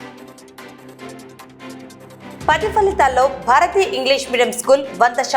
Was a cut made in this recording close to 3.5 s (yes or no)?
no